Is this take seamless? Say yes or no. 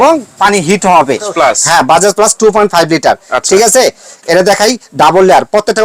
no